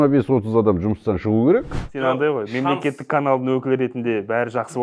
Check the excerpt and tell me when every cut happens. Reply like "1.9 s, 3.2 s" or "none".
1.8 s